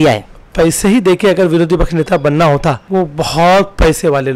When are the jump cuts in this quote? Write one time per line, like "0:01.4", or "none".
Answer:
0:02.8